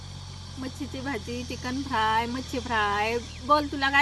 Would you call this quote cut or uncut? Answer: uncut